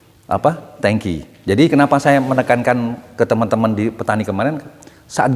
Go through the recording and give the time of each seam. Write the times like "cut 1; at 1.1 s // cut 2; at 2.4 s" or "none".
cut 1; at 1.7 s